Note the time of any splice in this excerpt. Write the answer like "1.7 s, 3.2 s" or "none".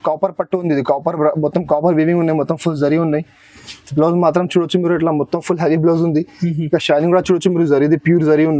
none